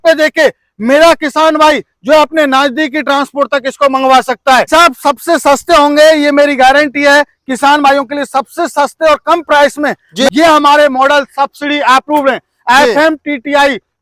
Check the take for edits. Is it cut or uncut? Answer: cut